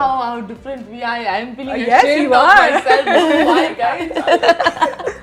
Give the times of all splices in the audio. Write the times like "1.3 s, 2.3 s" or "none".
none